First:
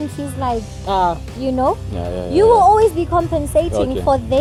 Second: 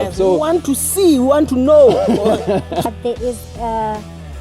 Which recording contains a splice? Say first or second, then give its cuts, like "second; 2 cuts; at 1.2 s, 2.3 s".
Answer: second; 1 cut; at 2.8 s